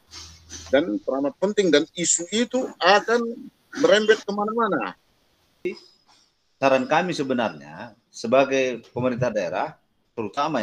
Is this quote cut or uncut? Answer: cut